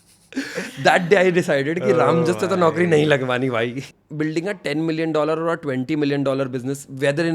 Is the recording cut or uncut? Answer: cut